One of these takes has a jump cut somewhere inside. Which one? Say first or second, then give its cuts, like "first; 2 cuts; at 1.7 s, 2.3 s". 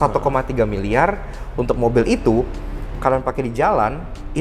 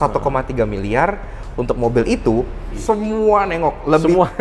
second; 1 cut; at 2.8 s